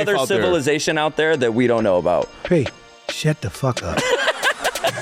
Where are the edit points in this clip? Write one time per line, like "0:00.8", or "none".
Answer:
none